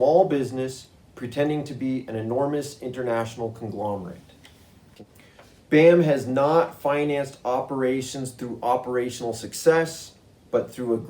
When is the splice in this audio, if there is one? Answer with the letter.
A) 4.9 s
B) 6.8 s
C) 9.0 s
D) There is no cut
A